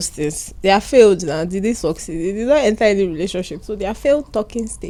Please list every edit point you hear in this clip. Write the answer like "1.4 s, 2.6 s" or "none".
none